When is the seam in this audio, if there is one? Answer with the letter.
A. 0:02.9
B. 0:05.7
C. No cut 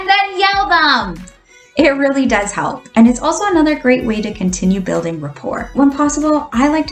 B